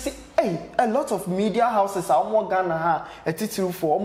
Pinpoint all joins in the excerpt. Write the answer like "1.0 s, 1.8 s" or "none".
none